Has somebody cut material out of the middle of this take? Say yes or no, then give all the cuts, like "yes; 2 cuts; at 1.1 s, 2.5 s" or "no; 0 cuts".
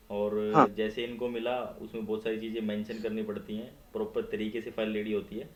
no; 0 cuts